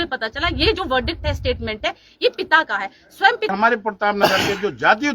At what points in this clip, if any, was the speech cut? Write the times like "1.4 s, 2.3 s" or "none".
3.5 s